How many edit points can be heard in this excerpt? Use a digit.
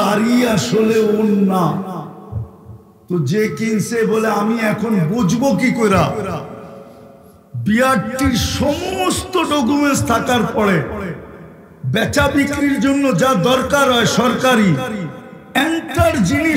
0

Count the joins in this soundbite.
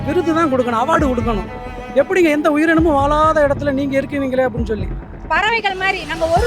1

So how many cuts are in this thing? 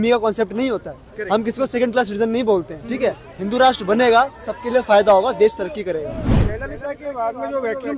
1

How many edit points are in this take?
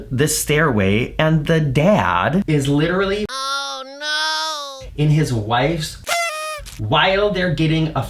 1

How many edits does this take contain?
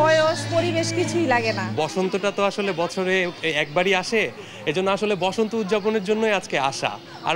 1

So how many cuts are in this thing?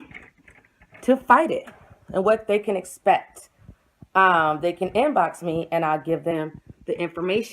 1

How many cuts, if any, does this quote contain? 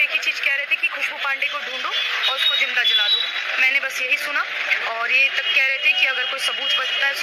0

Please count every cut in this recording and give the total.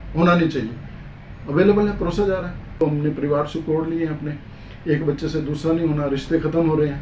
1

